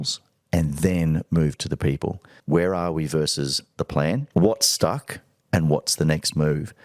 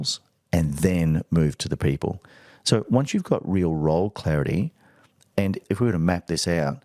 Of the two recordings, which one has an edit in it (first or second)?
first